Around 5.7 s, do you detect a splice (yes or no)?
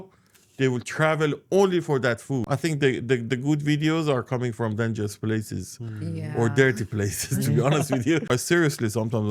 no